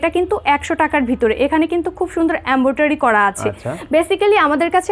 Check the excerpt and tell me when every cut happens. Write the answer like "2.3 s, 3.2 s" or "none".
none